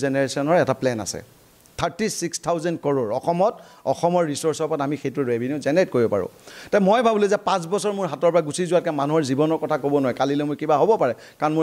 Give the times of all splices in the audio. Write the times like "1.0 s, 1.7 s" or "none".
none